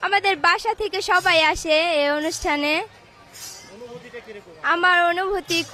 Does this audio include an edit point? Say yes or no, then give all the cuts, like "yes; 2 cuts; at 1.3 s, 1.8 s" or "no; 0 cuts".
no; 0 cuts